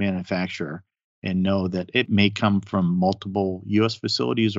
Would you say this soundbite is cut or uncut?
cut